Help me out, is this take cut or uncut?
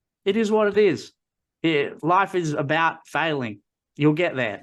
uncut